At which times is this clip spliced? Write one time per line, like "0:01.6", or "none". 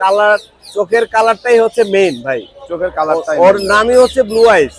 none